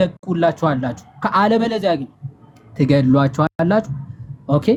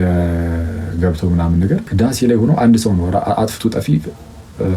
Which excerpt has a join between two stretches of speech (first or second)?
second